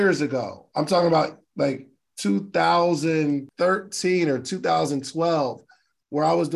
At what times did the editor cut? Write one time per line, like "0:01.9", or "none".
0:03.5